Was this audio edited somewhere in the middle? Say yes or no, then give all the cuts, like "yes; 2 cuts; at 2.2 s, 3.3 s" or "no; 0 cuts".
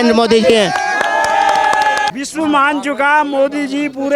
no; 0 cuts